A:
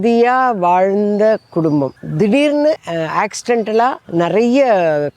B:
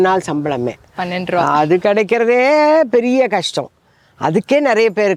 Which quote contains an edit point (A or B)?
A